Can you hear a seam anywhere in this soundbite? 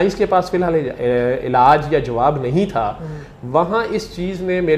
no; 0 cuts

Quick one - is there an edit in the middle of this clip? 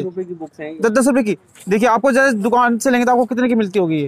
no; 0 cuts

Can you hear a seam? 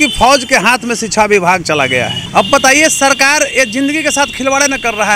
yes; 1 cut; at 2.2 s

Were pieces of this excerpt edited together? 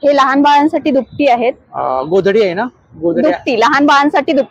no; 0 cuts

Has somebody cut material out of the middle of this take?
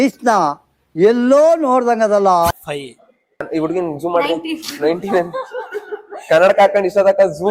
yes; 1 cut; at 3.5 s

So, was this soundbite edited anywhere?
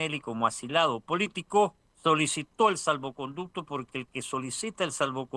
yes; 1 cut; at 1.9 s

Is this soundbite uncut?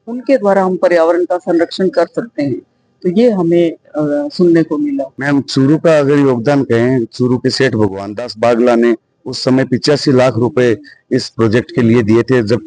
yes; 0 cuts

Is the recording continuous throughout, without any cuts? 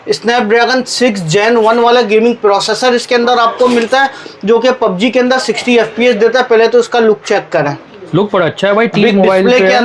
yes; 0 cuts

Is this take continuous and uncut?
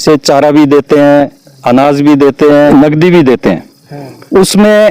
no; 1 cut; at 2.7 s

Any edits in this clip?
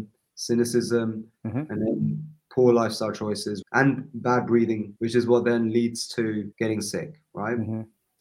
yes; 3 cuts; at 3.5 s, 4.9 s, 6.5 s

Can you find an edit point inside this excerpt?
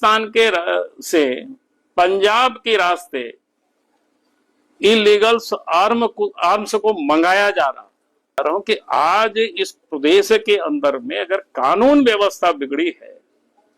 yes; 1 cut; at 8.4 s

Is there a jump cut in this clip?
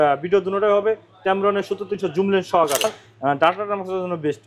yes; 1 cut; at 2.8 s

